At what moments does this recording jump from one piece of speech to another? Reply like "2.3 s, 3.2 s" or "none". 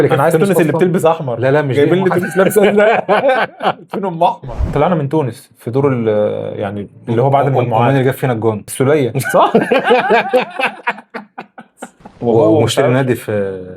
4.6 s, 12.2 s